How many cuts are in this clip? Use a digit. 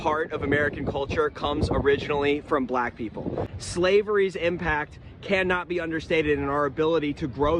1